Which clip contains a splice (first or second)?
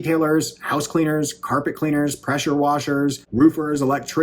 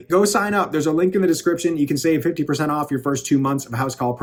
first